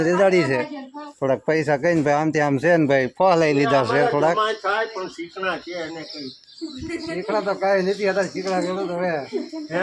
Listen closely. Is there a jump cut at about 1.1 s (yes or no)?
yes